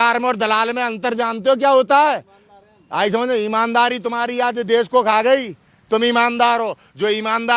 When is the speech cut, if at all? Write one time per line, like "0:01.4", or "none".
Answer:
none